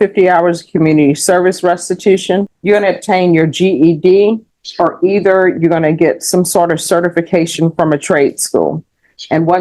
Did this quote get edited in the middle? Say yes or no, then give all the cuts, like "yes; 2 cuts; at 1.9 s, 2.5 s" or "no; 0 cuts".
yes; 1 cut; at 2.5 s